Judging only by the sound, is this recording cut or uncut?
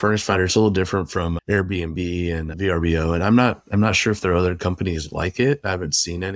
uncut